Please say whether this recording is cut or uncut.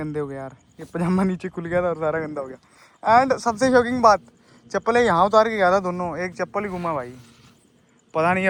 uncut